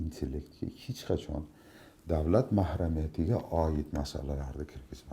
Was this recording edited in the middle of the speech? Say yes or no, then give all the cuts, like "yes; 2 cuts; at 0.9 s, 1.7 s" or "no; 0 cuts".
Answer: no; 0 cuts